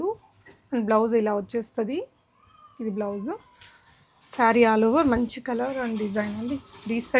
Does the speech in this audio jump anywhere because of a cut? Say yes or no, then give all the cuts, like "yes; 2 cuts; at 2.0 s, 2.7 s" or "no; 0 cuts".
no; 0 cuts